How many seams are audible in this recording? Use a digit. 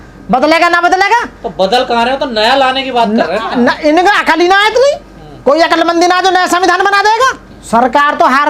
1